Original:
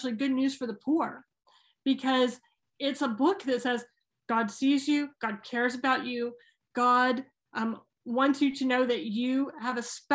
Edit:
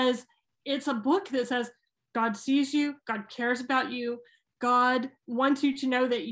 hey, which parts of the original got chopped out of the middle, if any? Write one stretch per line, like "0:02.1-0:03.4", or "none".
0:07.3-0:08.0